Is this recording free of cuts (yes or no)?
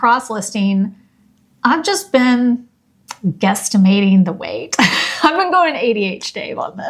yes